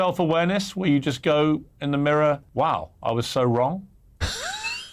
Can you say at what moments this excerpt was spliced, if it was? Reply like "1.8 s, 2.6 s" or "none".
2.4 s, 4.0 s